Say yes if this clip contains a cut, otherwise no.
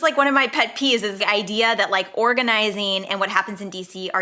yes